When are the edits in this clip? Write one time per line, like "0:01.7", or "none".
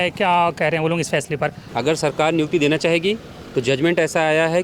0:01.6